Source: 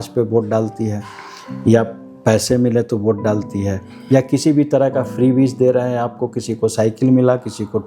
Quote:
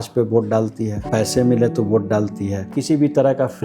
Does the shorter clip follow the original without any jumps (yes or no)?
no